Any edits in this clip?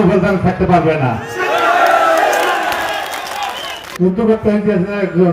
yes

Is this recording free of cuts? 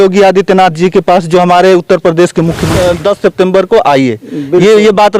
no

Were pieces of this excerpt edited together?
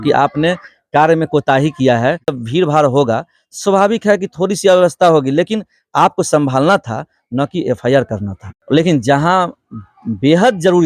yes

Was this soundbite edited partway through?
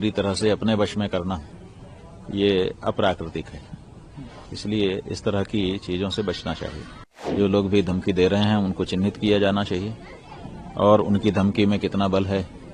yes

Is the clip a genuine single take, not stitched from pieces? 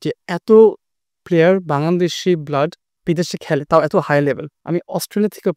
no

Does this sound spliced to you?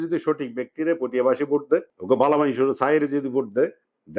yes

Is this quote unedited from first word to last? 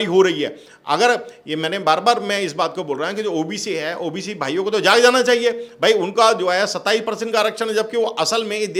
yes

